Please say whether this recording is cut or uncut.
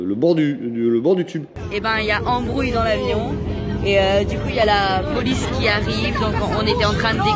cut